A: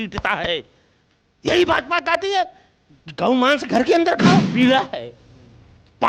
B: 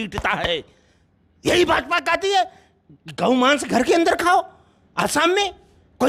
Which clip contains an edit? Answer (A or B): A